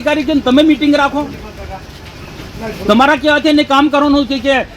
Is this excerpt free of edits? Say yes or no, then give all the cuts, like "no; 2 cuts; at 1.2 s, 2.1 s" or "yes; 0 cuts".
yes; 0 cuts